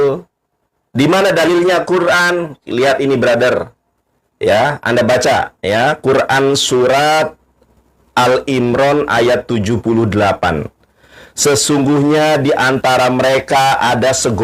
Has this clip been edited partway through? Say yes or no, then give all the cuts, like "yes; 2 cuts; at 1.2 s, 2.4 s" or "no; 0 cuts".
no; 0 cuts